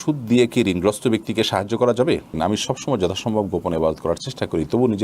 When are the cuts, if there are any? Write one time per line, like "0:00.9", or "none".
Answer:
0:02.4